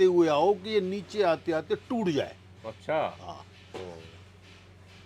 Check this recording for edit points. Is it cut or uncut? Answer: uncut